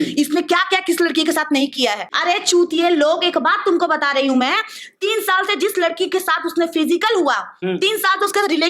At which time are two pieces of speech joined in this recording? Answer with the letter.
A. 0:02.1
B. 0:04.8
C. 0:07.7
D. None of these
A